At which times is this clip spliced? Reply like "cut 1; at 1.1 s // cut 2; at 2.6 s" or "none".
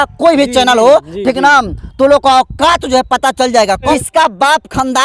cut 1; at 3.9 s